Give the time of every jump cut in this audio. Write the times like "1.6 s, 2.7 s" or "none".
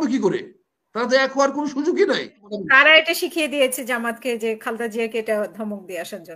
2.5 s

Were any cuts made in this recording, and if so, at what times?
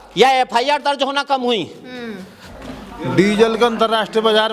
2.5 s

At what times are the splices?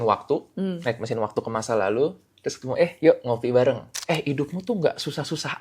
3.9 s

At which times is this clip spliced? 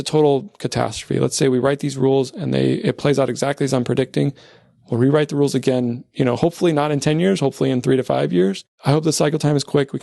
8.7 s

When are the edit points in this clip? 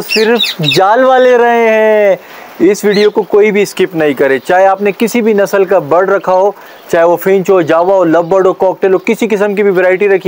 none

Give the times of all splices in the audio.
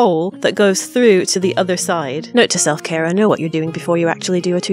2.2 s

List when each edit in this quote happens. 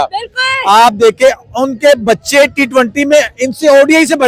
none

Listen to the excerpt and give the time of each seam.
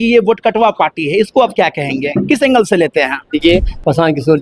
3.3 s

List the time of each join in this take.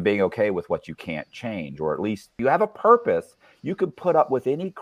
2.3 s

